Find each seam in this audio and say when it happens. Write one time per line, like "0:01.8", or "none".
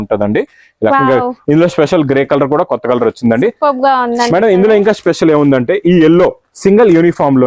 0:00.9